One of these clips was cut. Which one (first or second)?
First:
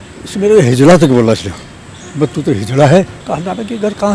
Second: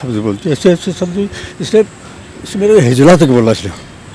first